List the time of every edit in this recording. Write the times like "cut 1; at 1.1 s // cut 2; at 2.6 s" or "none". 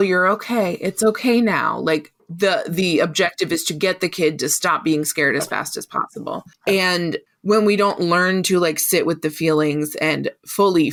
none